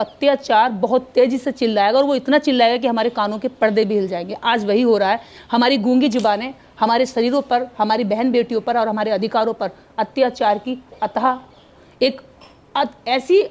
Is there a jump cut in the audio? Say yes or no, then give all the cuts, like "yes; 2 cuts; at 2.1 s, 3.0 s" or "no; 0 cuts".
no; 0 cuts